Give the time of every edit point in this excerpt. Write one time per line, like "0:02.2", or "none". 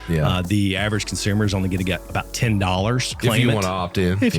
0:02.0
0:03.1